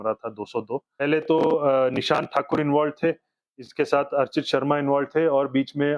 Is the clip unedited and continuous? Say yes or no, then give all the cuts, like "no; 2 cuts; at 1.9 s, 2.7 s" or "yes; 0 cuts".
no; 1 cut; at 0.9 s